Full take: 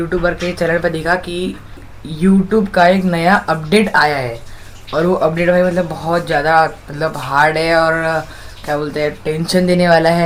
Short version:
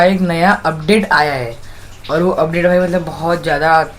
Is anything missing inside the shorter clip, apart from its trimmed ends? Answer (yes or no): no